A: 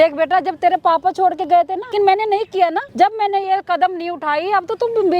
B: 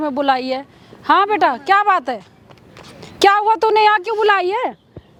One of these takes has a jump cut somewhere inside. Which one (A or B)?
A